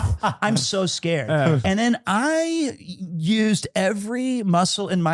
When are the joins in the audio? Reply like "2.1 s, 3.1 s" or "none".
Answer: 1.6 s